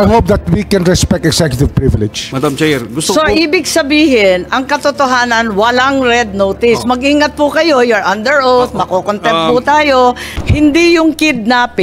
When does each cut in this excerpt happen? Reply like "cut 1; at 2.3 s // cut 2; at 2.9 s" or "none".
cut 1; at 2.2 s // cut 2; at 10.3 s